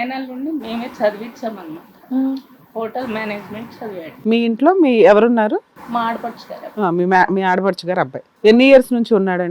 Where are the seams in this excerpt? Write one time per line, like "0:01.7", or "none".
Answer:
0:04.1
0:05.8
0:08.2